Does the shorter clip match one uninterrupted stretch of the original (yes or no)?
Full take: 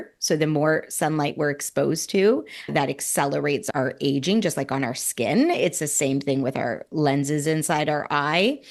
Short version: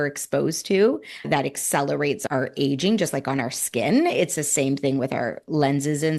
yes